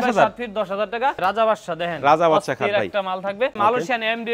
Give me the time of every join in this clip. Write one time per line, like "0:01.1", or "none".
0:01.2
0:03.6